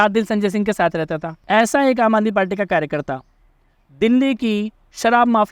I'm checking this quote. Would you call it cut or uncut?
cut